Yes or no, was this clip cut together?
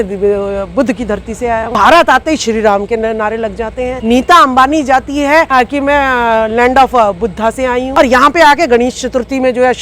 yes